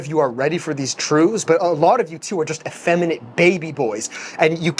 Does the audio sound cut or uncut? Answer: cut